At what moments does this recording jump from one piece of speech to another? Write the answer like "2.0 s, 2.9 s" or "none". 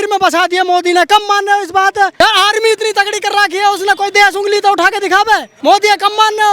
2.1 s, 5.5 s